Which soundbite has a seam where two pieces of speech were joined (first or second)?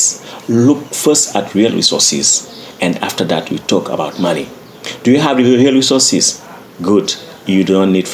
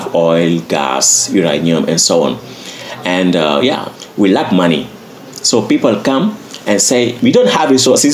second